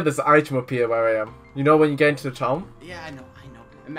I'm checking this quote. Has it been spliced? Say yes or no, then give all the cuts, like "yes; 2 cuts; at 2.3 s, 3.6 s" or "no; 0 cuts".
yes; 1 cut; at 2.8 s